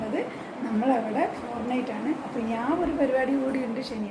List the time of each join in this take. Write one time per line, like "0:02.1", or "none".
none

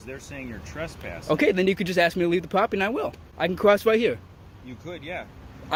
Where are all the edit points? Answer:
none

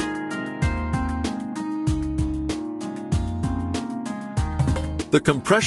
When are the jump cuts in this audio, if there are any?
none

